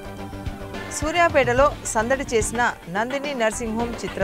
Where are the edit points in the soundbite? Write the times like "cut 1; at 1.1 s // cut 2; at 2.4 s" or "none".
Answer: cut 1; at 1.0 s

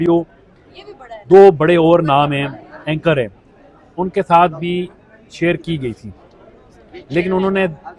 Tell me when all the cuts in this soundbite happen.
none

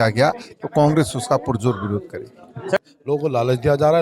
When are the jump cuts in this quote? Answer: cut 1; at 2.8 s

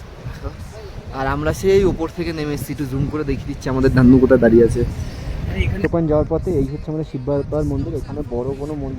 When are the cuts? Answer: cut 1; at 5.9 s

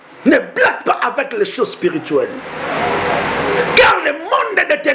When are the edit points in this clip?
none

